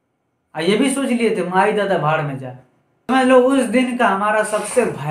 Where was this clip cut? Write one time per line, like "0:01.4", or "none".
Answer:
0:03.1